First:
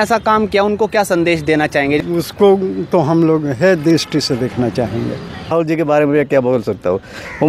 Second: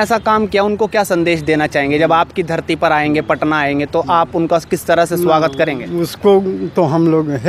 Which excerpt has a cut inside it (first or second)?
first